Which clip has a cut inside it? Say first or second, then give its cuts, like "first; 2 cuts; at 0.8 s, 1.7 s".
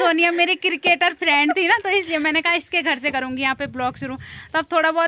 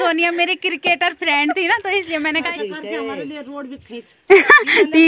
second; 1 cut; at 2.5 s